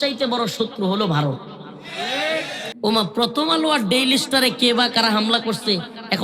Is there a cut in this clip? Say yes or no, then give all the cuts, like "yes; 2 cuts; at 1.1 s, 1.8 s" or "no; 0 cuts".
yes; 1 cut; at 2.7 s